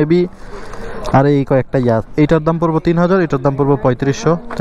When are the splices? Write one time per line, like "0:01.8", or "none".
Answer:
0:02.1